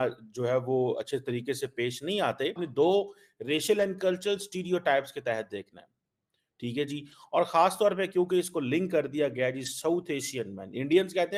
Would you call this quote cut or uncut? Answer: uncut